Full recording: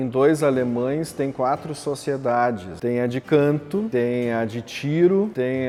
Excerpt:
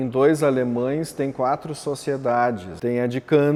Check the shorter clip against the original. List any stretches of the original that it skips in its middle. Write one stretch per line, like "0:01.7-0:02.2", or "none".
none